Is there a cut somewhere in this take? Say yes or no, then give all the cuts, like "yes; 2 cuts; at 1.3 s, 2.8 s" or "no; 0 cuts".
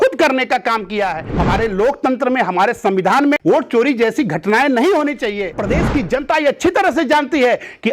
yes; 3 cuts; at 1.3 s, 3.4 s, 5.6 s